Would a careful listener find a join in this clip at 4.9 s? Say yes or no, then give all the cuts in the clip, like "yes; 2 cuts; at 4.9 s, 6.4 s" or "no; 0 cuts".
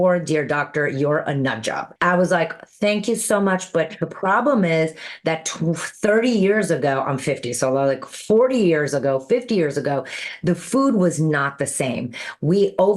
no; 1 cut; at 1.9 s